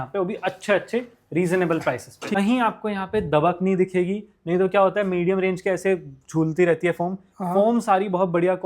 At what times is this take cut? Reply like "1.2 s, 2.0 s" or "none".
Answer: 2.4 s

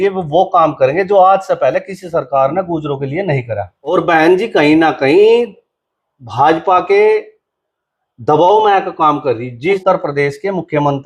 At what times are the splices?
3.9 s, 9.8 s

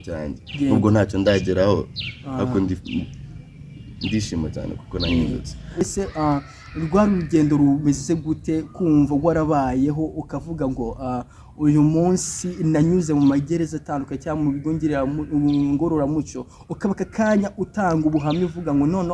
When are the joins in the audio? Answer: 5.8 s

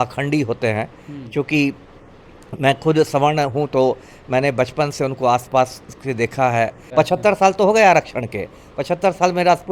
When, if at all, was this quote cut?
6.8 s

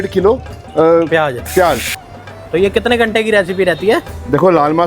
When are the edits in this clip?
2.2 s

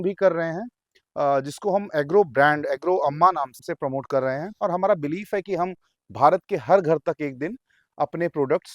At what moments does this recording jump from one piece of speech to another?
3.6 s, 4.5 s

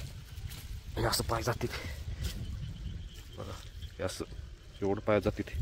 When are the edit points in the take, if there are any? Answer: none

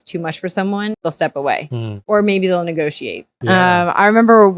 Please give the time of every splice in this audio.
1.0 s, 1.9 s, 3.3 s

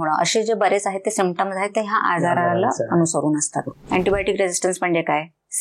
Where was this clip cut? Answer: 3.7 s

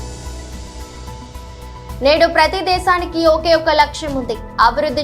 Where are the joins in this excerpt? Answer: 1.2 s

